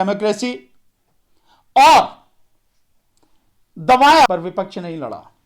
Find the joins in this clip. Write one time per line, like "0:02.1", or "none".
0:04.3

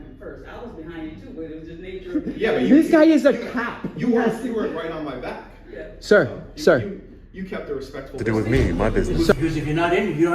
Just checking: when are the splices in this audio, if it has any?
0:08.2

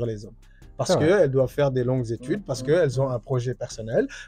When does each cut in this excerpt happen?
none

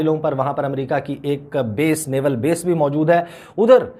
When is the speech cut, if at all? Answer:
none

